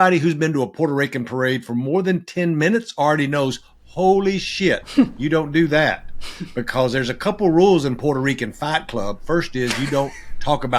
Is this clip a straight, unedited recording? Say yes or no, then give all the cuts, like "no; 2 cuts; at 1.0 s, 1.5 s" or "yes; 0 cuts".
yes; 0 cuts